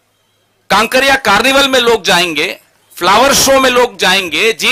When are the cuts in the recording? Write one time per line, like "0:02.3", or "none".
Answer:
none